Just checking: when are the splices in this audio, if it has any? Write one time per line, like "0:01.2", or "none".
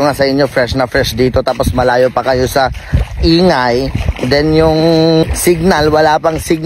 0:05.2